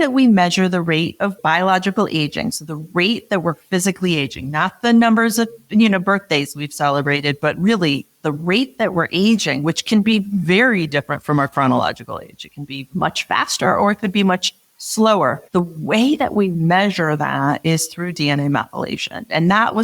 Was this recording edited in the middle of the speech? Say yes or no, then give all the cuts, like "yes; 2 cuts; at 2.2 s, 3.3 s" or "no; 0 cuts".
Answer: yes; 2 cuts; at 1.4 s, 15.4 s